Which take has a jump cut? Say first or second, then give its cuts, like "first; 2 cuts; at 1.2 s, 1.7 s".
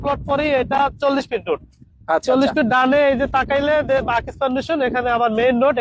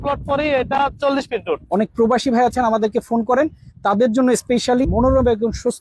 second; 2 cuts; at 1.6 s, 4.8 s